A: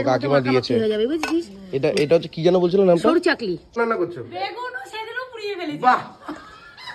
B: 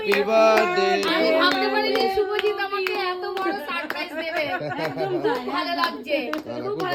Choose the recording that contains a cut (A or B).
A